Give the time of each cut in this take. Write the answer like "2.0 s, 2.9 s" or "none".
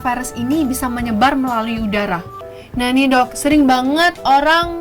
2.3 s

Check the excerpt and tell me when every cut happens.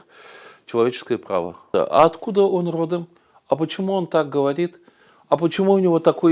1.6 s

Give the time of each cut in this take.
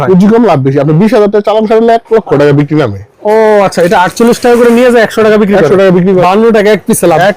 3.1 s, 6.2 s

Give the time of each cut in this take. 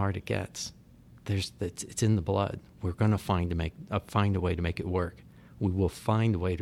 none

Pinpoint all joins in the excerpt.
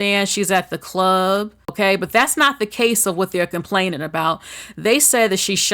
1.7 s

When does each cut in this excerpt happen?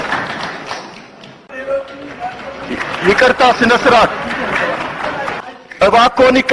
5.4 s

